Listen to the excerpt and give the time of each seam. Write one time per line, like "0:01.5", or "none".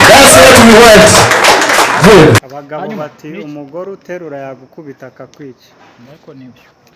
0:02.4